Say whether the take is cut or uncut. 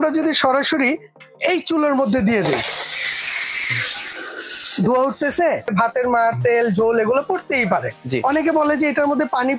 cut